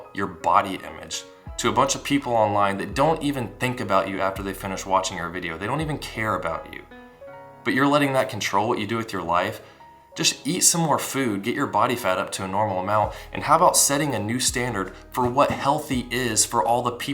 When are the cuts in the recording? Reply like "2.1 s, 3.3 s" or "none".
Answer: none